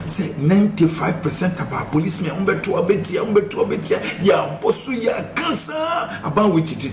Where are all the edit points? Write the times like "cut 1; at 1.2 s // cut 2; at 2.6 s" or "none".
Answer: none